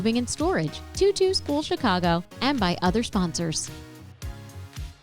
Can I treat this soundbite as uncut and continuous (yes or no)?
no